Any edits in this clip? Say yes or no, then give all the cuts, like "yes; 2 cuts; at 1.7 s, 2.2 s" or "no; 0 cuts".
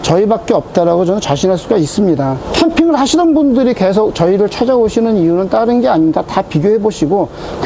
yes; 1 cut; at 2.4 s